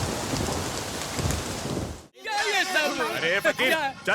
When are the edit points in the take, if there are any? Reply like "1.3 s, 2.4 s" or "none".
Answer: 2.1 s